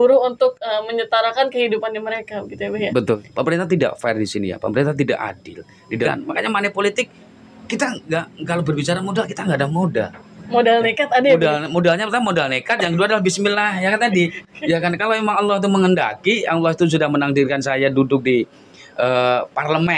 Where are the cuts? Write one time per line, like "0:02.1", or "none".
0:03.2
0:06.1